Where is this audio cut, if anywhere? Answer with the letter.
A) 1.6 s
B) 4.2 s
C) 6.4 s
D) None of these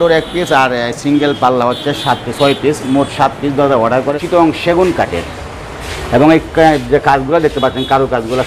B